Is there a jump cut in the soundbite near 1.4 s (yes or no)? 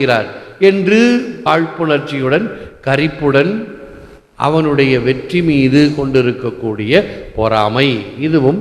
yes